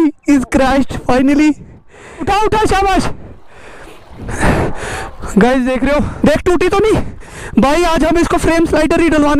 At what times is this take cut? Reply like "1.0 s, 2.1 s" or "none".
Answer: 2.3 s, 6.1 s